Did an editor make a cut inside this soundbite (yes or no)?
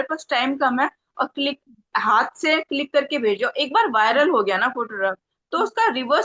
no